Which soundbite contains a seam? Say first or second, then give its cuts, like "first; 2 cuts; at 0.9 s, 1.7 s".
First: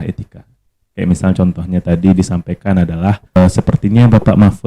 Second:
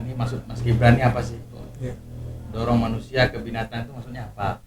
first; 1 cut; at 3.4 s